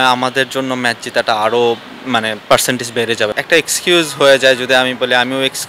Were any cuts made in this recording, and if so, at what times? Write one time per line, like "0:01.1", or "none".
0:03.4